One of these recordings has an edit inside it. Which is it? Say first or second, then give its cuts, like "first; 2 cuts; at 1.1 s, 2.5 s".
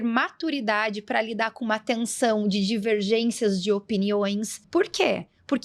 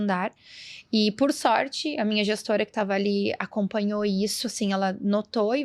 first; 1 cut; at 4.6 s